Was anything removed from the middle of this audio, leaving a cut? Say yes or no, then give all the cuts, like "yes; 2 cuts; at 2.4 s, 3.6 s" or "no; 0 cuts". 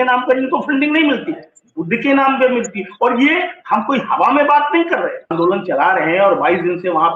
yes; 1 cut; at 5.3 s